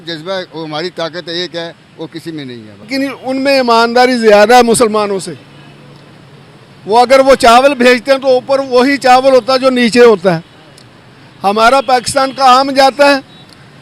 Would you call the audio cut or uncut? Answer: cut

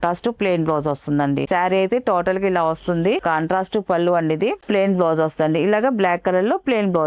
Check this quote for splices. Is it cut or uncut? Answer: cut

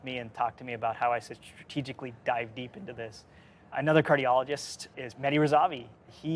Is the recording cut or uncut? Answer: uncut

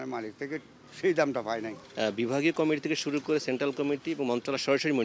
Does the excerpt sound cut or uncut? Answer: cut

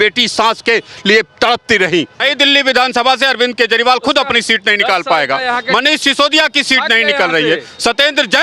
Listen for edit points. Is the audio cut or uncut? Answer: cut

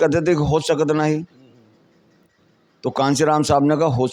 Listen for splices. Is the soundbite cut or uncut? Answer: uncut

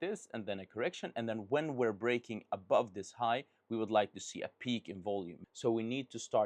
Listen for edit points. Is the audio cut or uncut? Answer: cut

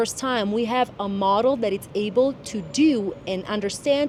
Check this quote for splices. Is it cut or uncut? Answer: uncut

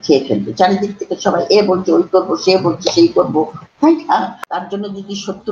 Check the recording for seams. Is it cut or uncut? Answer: cut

